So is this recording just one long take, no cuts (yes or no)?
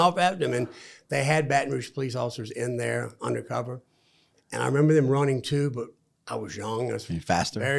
yes